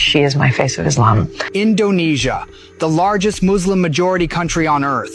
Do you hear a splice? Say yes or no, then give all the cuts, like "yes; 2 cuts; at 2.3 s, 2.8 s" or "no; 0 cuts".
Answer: yes; 1 cut; at 1.4 s